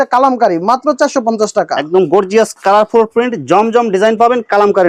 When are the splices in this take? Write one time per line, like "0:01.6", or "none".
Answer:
none